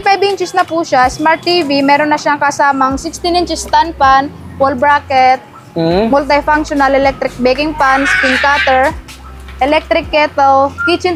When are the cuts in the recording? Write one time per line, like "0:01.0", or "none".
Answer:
none